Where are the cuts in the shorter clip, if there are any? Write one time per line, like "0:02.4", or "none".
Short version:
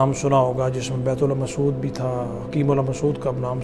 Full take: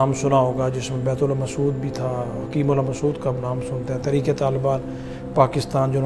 none